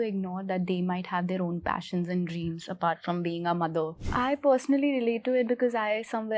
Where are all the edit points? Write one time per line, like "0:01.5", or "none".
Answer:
0:04.0